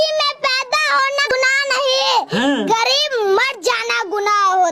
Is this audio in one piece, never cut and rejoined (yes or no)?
no